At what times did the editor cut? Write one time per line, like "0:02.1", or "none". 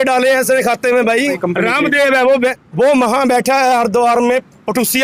0:01.4
0:02.6